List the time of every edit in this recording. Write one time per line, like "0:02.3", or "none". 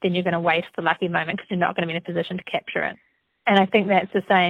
none